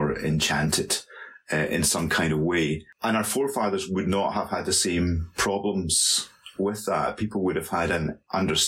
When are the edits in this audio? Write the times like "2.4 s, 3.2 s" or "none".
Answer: none